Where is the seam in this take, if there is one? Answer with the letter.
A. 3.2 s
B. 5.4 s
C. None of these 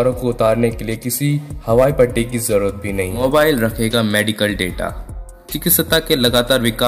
A